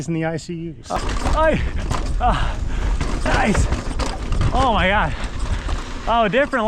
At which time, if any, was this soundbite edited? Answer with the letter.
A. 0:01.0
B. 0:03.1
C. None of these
A